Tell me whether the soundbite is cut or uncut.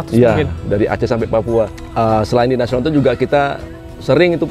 cut